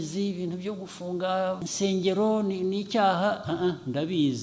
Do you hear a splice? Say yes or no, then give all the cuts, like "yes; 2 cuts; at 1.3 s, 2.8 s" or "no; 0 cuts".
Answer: yes; 1 cut; at 1.7 s